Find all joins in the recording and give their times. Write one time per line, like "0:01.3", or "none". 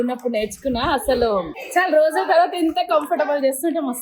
0:01.6